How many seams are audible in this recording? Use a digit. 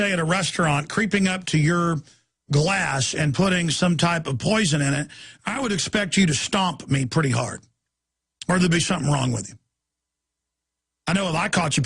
1